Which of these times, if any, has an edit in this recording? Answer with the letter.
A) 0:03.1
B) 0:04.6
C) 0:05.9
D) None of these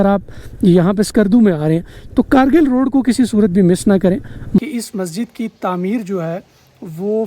B